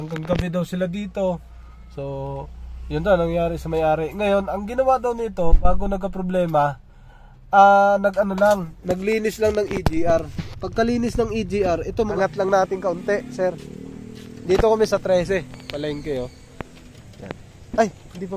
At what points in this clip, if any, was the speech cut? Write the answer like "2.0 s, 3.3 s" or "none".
12.1 s